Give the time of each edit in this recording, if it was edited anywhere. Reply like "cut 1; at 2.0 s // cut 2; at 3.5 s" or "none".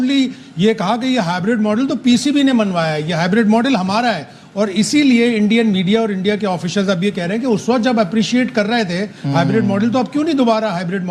none